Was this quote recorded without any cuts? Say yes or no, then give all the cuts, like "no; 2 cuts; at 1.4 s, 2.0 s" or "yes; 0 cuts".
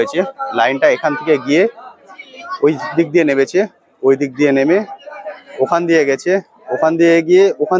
yes; 0 cuts